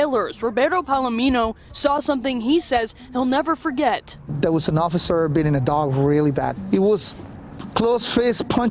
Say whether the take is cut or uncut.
cut